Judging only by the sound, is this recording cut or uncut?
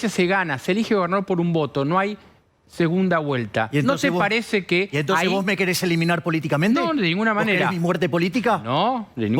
uncut